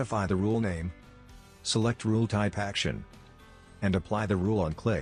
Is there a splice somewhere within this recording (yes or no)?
no